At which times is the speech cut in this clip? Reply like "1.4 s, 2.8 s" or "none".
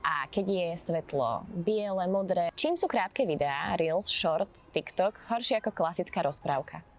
2.5 s

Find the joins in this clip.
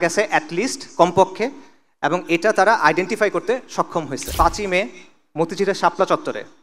4.2 s

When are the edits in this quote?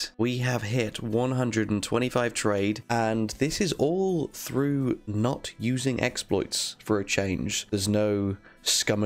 2.8 s

